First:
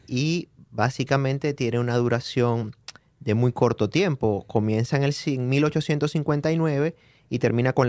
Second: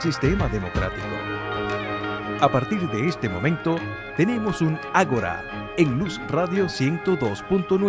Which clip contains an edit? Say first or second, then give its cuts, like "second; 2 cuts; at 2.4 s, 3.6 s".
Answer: first; 1 cut; at 1.6 s